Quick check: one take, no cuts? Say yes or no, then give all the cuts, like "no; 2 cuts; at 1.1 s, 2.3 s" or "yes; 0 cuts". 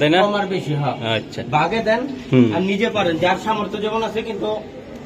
yes; 0 cuts